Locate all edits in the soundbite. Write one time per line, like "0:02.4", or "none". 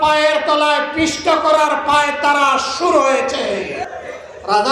0:03.8